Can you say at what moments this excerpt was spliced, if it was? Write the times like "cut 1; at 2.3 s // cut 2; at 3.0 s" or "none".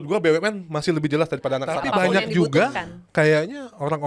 cut 1; at 1.8 s